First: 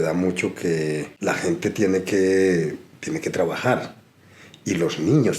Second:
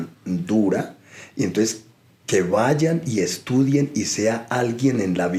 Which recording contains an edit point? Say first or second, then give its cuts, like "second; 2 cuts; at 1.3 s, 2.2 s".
first; 1 cut; at 1.1 s